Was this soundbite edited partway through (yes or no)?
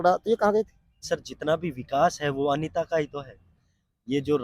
yes